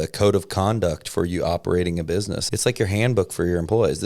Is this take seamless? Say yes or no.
no